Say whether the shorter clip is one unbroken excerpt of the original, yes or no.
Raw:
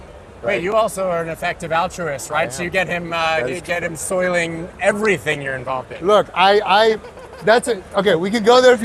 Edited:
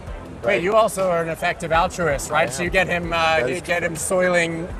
yes